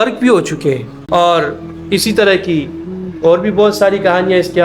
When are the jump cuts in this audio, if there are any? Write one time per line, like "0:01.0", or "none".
0:00.9